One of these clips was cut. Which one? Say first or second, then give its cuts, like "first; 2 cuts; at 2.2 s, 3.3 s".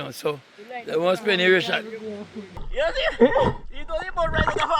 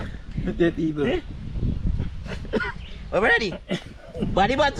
first; 1 cut; at 2.6 s